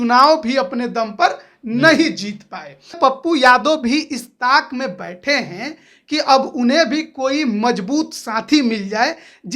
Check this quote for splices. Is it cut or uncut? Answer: cut